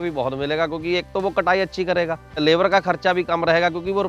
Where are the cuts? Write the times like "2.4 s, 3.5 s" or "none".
2.4 s